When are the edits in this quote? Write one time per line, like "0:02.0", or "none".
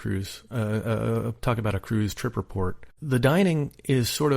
0:02.9